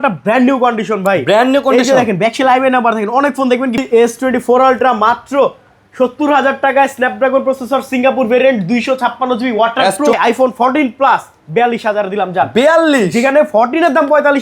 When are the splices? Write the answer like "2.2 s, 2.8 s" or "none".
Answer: 3.8 s, 10.1 s